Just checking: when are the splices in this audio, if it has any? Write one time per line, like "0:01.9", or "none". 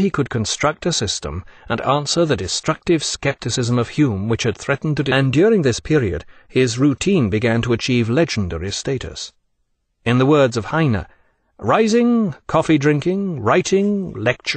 none